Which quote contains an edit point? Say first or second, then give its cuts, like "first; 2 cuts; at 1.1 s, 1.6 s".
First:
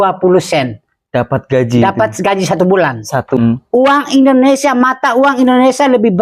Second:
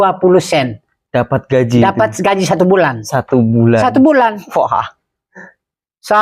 first; 1 cut; at 3.4 s